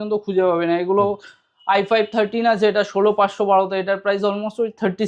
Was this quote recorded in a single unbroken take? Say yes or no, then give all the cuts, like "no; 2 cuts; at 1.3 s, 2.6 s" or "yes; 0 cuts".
yes; 0 cuts